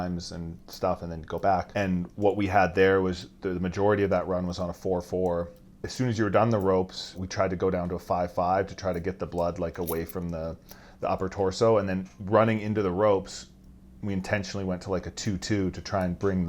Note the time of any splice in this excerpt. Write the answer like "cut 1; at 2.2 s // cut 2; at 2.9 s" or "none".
cut 1; at 1.7 s // cut 2; at 7.2 s